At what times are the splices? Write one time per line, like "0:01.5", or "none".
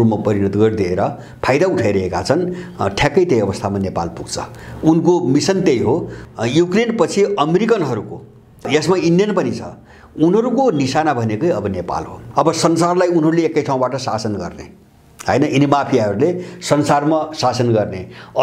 0:06.1
0:08.7
0:12.2